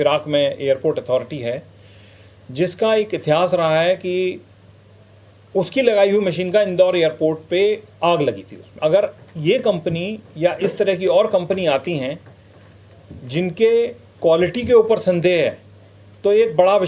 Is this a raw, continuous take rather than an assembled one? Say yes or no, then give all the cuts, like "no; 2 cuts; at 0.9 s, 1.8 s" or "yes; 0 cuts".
no; 1 cut; at 8.7 s